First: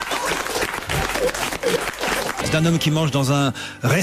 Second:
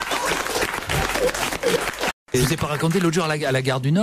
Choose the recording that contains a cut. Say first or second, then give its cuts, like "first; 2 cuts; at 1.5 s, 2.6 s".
first; 1 cut; at 2.2 s